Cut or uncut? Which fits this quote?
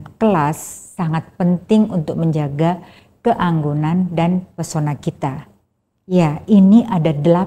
uncut